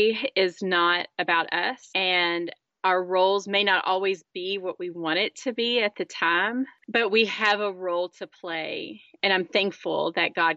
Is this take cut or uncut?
uncut